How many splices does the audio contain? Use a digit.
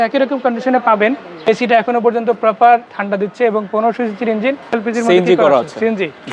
2